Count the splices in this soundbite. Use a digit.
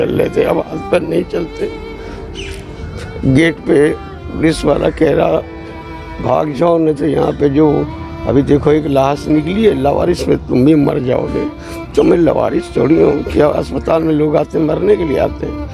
0